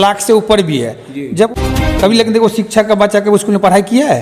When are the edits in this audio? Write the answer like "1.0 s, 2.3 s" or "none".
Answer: 1.5 s